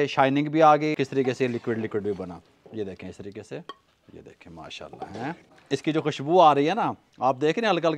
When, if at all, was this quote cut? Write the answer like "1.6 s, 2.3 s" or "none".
1.0 s, 5.5 s